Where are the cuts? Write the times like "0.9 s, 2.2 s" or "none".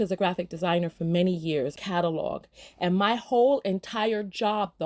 1.7 s